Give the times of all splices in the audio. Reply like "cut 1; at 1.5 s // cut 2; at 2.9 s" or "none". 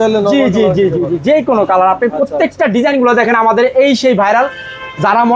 none